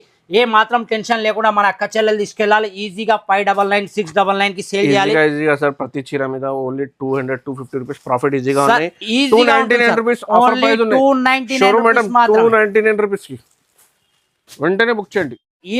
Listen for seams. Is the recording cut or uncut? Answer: uncut